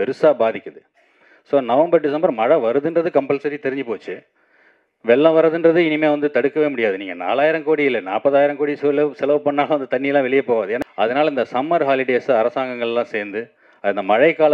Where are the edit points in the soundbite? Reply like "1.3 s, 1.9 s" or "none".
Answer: 10.8 s